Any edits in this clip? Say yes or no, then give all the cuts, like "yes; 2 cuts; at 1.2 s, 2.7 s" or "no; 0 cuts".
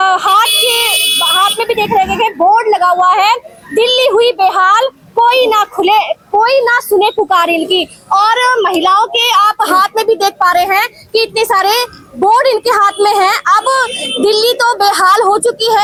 no; 0 cuts